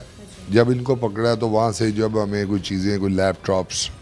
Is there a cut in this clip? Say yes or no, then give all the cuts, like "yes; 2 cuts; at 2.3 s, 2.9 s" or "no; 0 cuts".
no; 0 cuts